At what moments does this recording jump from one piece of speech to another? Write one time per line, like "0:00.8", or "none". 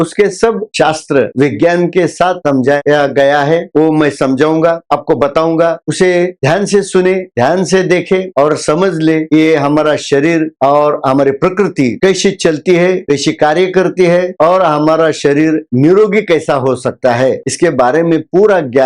none